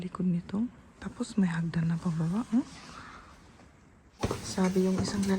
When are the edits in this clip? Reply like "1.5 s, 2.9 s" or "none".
4.2 s